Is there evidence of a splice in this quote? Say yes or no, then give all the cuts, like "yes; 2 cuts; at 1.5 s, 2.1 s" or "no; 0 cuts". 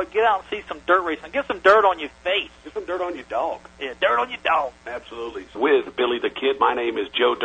no; 0 cuts